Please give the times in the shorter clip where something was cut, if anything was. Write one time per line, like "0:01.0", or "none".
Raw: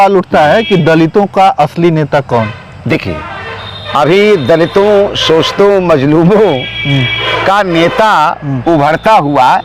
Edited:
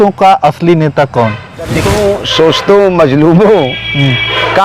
0:01.9